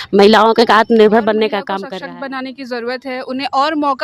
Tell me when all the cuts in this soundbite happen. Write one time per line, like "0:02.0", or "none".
0:01.7